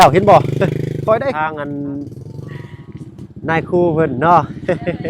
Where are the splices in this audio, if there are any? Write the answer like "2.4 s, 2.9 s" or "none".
1.4 s